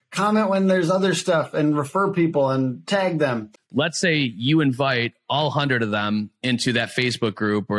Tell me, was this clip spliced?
yes; 1 cut; at 3.6 s

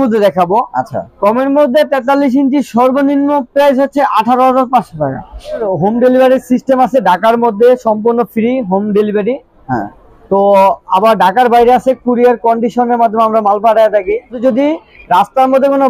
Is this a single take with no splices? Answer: no; 2 cuts; at 5.6 s, 14.3 s

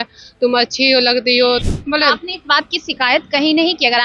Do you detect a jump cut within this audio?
yes; 1 cut; at 1.6 s

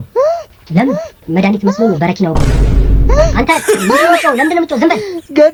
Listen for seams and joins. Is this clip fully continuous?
yes; 0 cuts

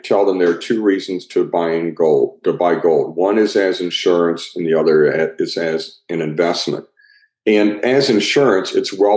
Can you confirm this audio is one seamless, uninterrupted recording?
yes; 0 cuts

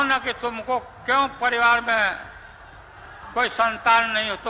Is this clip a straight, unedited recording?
yes; 0 cuts

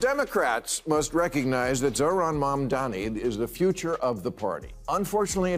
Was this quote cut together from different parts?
no; 0 cuts

